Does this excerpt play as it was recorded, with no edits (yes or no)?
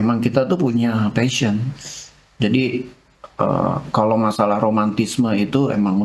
yes